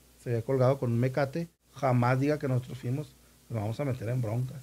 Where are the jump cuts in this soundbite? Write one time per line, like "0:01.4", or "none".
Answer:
0:01.6